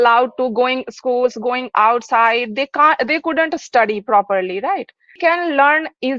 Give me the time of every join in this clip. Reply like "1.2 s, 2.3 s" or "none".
5.2 s